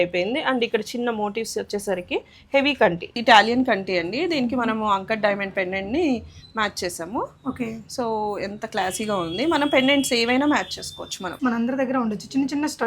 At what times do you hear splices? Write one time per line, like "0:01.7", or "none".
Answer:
0:03.1
0:11.4